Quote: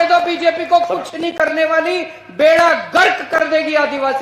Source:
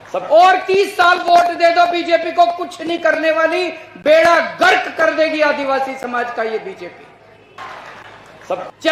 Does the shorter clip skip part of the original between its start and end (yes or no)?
no